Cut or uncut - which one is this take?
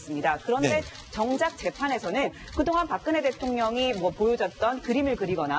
cut